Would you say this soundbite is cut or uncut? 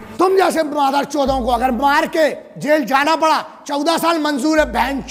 uncut